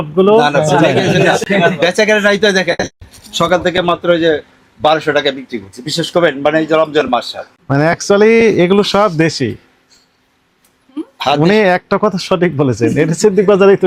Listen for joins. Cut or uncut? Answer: uncut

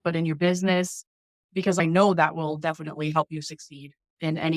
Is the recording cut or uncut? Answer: cut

